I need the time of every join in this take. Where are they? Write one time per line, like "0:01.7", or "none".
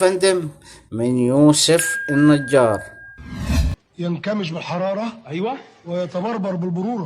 0:03.7